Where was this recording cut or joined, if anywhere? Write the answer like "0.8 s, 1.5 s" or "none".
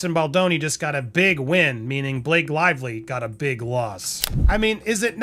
4.2 s